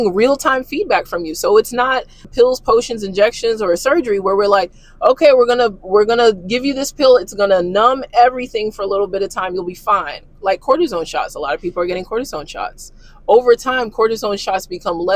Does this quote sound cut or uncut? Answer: cut